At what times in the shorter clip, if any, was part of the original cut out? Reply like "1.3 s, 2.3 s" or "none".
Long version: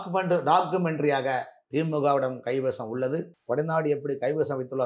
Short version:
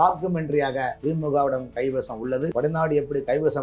1.0 s, 2.5 s